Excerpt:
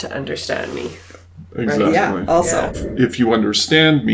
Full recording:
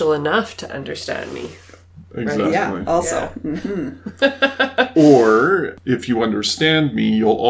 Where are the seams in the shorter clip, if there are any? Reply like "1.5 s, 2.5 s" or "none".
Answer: 2.8 s